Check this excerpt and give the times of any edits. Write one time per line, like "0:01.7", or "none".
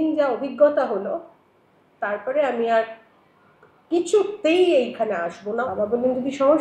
0:05.6